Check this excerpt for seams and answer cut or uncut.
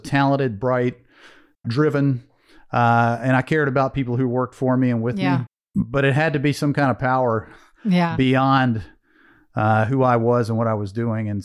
cut